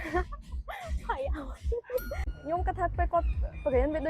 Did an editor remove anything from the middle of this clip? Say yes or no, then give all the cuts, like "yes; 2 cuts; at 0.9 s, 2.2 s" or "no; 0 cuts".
yes; 1 cut; at 2.3 s